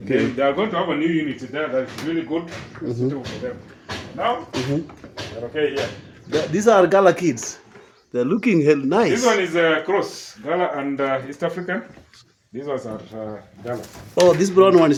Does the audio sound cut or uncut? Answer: uncut